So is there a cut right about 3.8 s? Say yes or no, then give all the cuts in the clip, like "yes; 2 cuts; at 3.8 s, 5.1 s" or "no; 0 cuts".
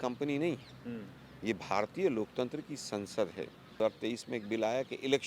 yes; 1 cut; at 3.8 s